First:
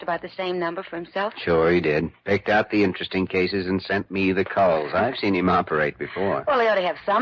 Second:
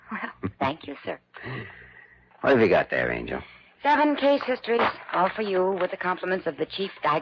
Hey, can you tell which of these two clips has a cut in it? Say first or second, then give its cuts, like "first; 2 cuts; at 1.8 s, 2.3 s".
second; 1 cut; at 1.0 s